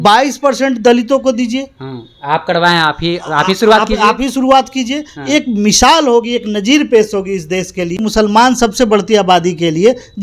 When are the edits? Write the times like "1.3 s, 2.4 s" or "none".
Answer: 7.9 s